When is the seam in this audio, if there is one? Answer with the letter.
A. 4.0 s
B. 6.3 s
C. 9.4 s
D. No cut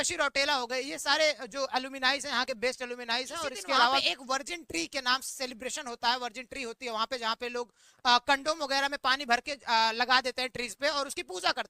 A